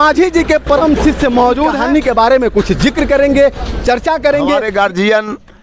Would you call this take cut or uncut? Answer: cut